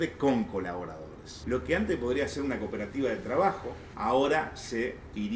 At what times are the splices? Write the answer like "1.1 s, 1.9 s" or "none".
1.3 s, 3.9 s